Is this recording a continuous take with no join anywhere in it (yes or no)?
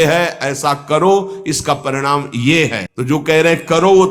no